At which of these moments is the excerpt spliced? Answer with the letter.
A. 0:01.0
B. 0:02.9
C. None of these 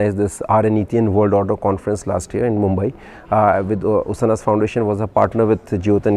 C